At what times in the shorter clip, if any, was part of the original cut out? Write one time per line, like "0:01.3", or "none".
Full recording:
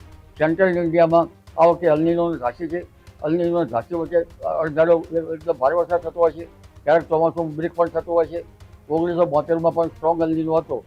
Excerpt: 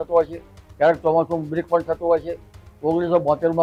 none